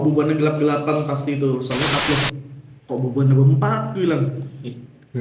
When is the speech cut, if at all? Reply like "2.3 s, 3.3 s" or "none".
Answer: 2.0 s